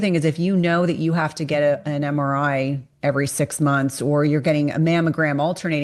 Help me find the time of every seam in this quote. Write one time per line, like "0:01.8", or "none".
none

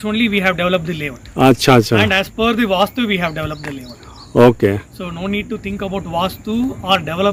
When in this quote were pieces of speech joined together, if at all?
none

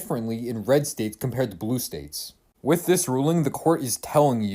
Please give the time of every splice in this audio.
0:03.5

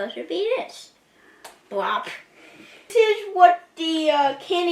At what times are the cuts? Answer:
0:02.9

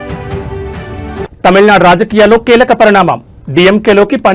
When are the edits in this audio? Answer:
none

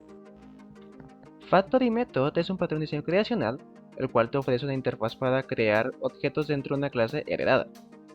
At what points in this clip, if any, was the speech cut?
0:01.0

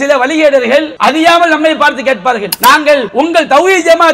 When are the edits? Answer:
0:00.9
0:02.5
0:03.1

